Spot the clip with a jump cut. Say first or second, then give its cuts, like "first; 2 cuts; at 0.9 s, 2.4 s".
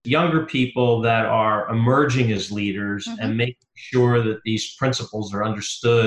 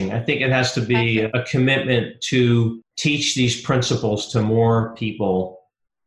second; 2 cuts; at 1.3 s, 2.9 s